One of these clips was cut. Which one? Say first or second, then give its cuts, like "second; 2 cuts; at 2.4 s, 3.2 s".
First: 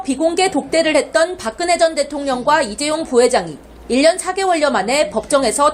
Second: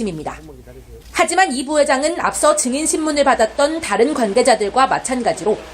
second; 1 cut; at 3.8 s